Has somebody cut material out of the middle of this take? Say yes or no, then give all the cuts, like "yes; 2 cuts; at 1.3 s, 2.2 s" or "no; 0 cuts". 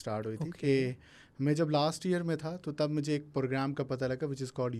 no; 0 cuts